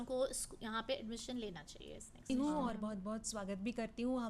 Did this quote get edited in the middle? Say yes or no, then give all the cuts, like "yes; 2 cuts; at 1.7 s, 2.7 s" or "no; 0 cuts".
yes; 1 cut; at 2.3 s